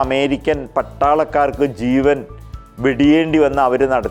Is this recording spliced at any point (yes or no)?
no